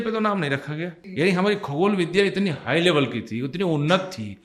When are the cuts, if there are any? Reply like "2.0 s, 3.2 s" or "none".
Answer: 1.0 s